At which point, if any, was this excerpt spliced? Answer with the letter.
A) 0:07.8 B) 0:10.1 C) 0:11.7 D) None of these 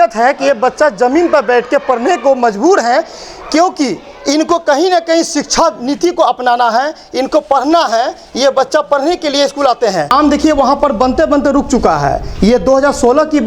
B